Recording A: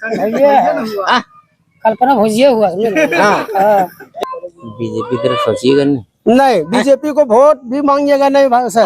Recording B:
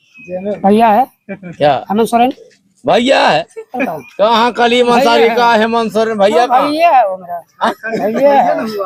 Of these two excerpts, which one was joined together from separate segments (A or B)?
A